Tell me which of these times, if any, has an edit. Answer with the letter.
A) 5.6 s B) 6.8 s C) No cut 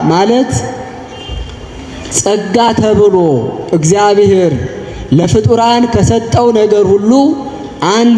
C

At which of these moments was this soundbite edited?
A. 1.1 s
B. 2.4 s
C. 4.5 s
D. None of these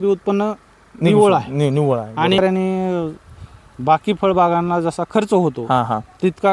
B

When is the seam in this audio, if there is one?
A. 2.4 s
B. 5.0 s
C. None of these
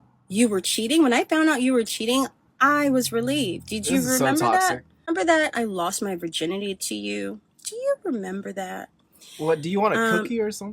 B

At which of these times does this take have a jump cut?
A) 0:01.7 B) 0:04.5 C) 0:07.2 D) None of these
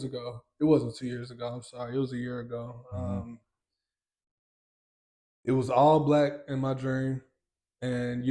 D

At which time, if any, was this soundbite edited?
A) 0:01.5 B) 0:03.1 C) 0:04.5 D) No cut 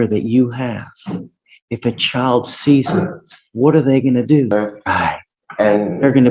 C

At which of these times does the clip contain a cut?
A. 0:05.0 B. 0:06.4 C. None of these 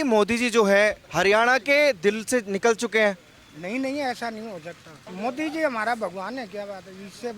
A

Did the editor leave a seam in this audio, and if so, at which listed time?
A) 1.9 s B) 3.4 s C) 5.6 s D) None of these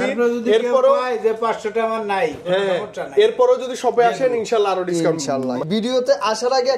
C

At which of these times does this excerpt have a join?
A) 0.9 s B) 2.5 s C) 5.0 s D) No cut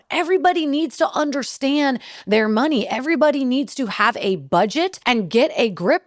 C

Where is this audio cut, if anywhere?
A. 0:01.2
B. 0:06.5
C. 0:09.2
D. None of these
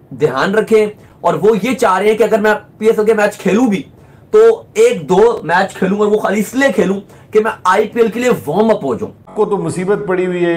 C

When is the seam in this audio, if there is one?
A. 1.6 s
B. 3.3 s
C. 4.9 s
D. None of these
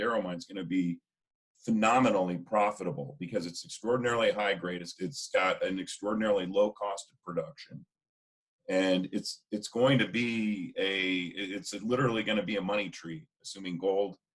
C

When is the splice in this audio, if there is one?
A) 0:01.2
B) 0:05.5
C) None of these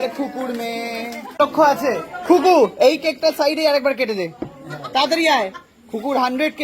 A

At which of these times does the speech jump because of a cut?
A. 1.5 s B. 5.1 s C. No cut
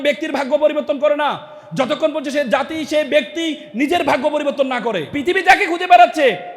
B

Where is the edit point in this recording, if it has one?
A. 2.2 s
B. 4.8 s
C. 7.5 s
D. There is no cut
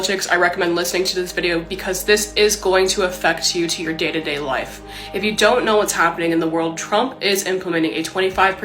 D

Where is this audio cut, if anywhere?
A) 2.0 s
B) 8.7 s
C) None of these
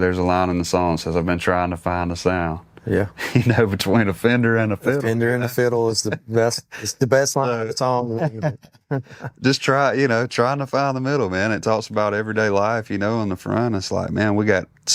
C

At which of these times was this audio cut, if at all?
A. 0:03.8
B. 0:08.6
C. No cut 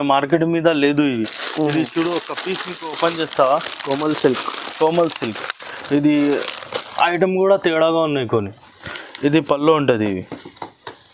B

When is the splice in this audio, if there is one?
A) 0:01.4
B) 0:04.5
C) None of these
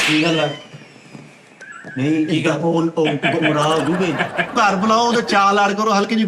B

